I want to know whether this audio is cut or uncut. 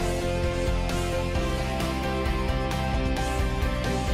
cut